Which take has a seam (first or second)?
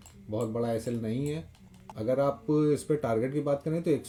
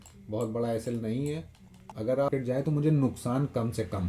second